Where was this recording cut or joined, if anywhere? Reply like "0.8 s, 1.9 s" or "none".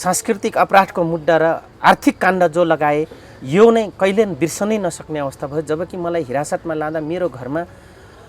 1.7 s